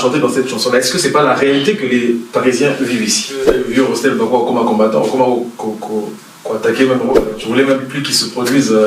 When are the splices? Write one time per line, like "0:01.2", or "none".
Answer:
0:03.6
0:07.3